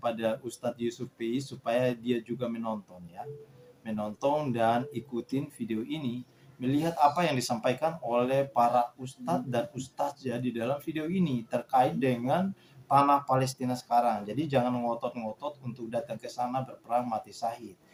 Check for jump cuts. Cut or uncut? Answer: uncut